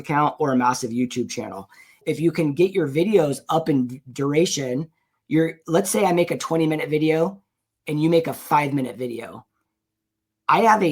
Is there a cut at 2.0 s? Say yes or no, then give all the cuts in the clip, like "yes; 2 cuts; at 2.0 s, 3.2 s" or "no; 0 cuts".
yes; 1 cut; at 2.0 s